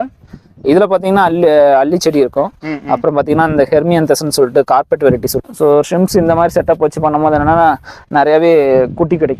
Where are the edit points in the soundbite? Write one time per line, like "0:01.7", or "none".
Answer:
0:05.3